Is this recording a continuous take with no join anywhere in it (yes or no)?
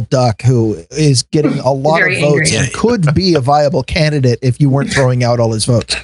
yes